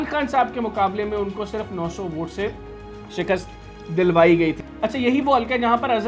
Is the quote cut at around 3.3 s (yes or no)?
no